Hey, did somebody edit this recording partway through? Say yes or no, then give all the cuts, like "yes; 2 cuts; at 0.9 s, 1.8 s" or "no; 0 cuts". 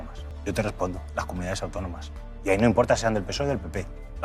no; 0 cuts